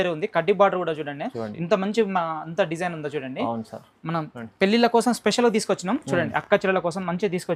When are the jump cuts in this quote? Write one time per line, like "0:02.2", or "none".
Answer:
none